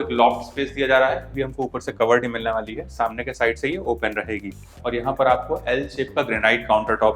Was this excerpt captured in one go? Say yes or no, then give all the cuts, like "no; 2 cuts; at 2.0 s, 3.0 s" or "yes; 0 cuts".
no; 2 cuts; at 1.3 s, 4.7 s